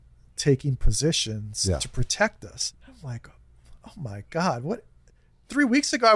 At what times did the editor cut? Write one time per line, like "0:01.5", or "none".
0:02.6